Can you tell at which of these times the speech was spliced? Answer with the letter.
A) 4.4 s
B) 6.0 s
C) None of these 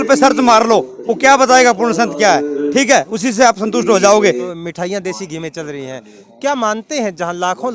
A